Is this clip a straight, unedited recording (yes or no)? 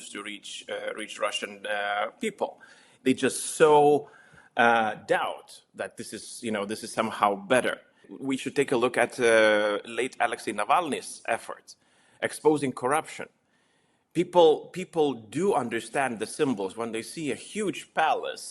no